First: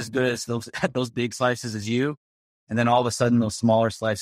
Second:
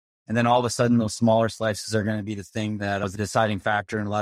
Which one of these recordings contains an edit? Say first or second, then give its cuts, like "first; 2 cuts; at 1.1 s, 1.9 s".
second; 1 cut; at 3.1 s